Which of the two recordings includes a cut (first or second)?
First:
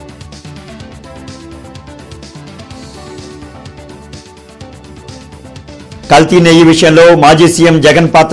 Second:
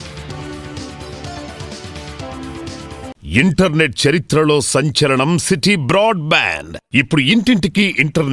second